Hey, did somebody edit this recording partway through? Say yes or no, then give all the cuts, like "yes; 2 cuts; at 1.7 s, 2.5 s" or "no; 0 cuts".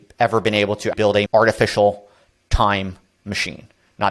yes; 1 cut; at 0.9 s